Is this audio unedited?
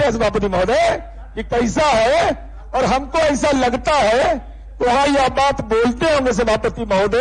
yes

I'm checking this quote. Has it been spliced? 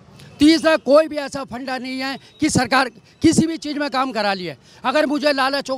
no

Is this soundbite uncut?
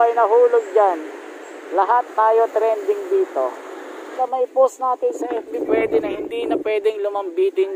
no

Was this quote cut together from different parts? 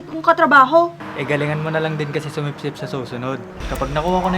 yes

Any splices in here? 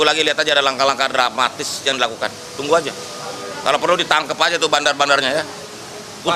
no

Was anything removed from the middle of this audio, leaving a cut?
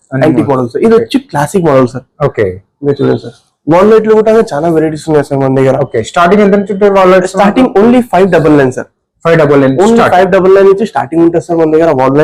no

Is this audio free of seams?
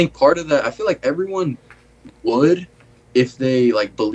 yes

